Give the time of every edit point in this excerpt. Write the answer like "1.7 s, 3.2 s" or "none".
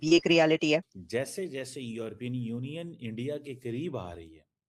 1.0 s